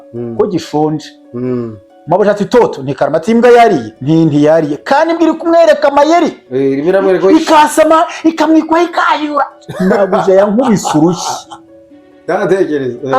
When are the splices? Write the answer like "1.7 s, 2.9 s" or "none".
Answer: 3.9 s